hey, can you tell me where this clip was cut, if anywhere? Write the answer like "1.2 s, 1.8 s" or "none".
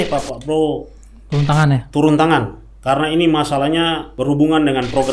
4.1 s